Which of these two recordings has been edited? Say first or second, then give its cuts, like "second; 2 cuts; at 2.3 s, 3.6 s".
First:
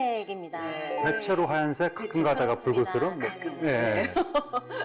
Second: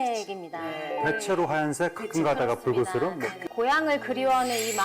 second; 1 cut; at 3.4 s